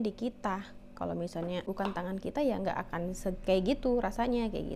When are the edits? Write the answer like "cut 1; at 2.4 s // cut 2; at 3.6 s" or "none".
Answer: cut 1; at 1.7 s